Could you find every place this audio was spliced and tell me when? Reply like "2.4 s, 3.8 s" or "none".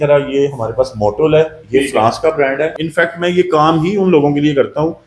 2.7 s